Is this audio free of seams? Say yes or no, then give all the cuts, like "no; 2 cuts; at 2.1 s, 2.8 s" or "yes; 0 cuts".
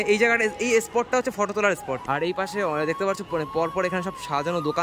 no; 1 cut; at 2.0 s